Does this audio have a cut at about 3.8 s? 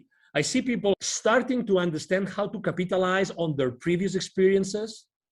no; 1 cut; at 0.9 s

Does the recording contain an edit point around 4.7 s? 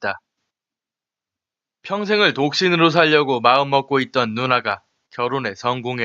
no; 1 cut; at 2.9 s

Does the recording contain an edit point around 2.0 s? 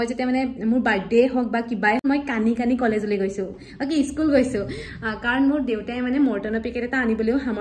yes; 1 cut; at 2.0 s

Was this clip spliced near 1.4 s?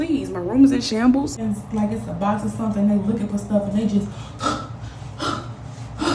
yes; 1 cut; at 1.4 s

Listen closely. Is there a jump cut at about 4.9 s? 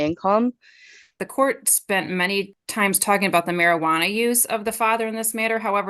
no; 2 cuts; at 1.2 s, 2.6 s

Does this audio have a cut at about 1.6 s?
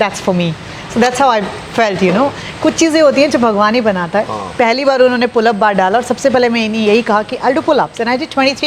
no; 0 cuts

